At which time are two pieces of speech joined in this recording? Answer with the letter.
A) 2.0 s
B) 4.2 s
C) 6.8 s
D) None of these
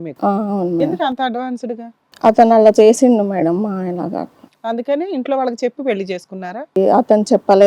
C